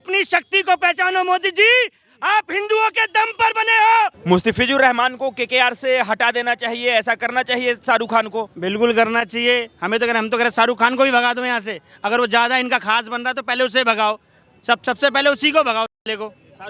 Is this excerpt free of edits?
no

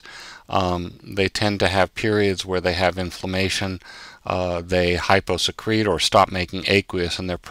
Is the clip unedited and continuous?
yes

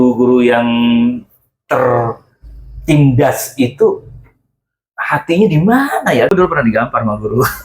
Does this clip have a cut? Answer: yes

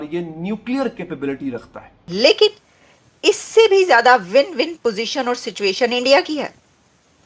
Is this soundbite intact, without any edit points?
no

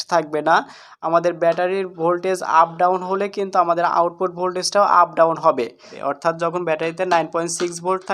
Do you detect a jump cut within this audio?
yes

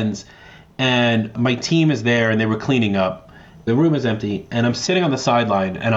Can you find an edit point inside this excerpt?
yes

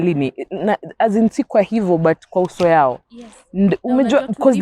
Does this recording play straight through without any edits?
yes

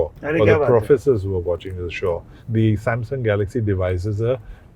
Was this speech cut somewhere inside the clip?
yes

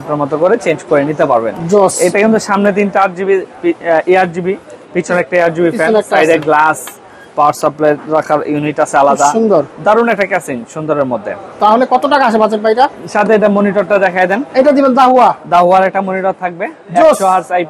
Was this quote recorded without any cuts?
yes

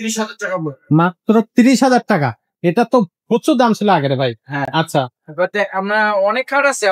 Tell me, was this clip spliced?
no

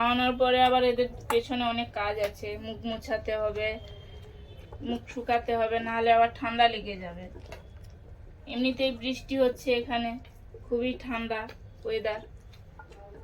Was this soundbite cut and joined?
no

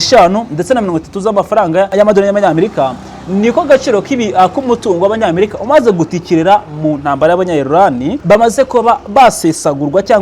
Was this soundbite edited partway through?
yes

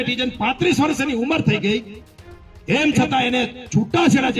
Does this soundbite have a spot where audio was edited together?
no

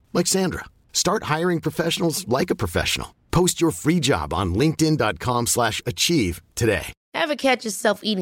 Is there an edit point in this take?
yes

